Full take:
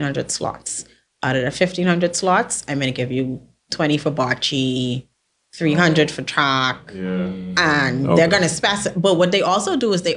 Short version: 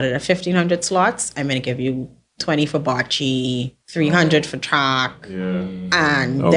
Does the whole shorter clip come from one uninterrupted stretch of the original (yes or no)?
no